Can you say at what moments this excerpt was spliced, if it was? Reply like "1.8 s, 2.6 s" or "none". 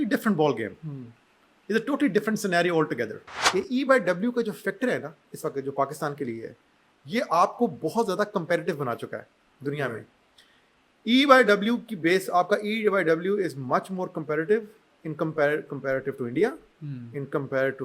3.4 s